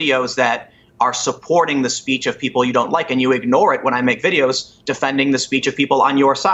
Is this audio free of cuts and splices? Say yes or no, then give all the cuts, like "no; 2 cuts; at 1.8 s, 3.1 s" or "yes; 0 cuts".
yes; 0 cuts